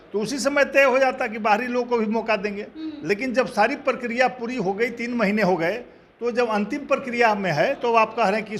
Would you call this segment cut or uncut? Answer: uncut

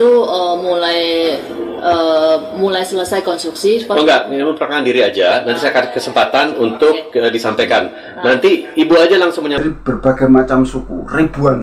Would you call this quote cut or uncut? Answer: cut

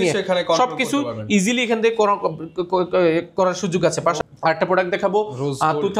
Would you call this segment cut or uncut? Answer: cut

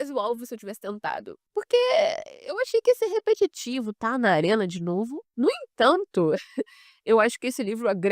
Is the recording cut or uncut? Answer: cut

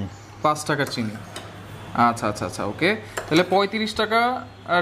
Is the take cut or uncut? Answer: uncut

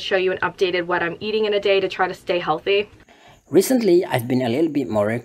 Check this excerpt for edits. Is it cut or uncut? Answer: uncut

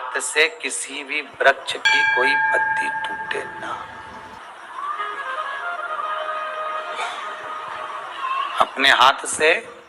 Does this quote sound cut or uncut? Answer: cut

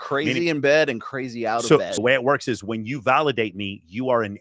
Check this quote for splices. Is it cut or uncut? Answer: cut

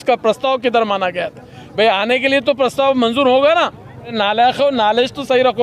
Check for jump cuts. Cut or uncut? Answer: cut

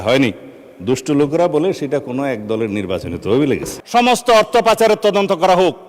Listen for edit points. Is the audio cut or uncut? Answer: cut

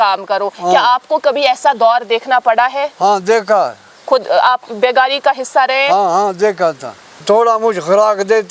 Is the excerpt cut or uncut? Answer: cut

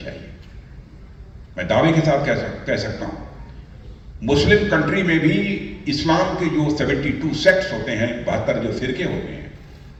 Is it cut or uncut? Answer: uncut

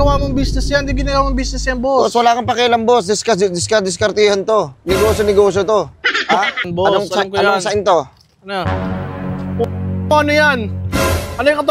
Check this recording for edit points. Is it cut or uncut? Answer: cut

